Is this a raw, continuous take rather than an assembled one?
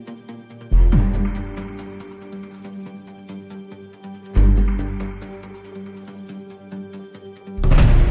no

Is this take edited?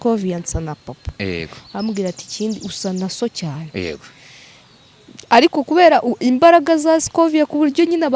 no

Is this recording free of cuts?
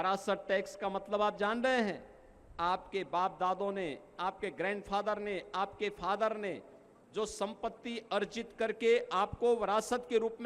yes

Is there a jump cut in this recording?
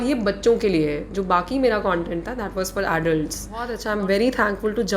yes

